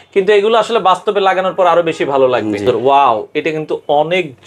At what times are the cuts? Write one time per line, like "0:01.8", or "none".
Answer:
0:02.8